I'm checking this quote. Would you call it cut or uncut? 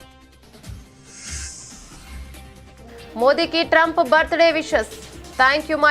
cut